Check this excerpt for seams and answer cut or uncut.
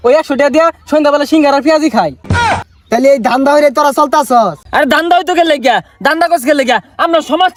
uncut